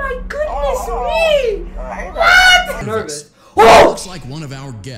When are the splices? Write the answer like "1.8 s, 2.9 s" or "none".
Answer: 2.7 s